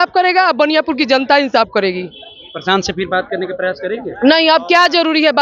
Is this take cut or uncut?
uncut